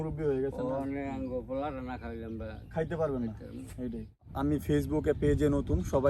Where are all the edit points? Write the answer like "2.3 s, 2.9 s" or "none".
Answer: 4.3 s